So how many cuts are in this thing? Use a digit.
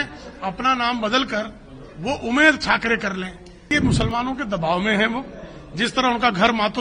1